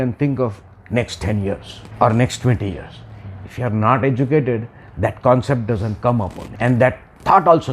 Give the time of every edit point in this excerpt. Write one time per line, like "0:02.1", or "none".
0:01.8
0:06.4